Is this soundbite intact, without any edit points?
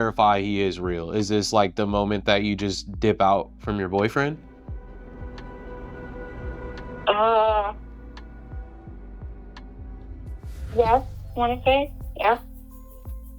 no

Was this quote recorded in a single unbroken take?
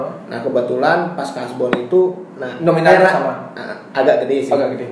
yes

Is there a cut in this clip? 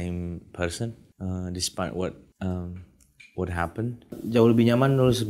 yes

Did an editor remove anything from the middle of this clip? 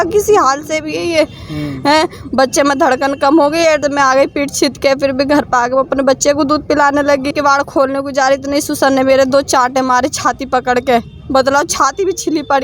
yes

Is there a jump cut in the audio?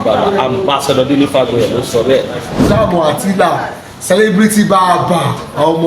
yes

